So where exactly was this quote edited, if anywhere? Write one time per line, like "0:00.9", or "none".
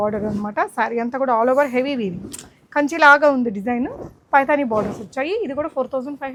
none